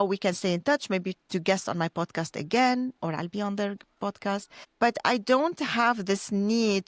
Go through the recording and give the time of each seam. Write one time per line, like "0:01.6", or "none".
none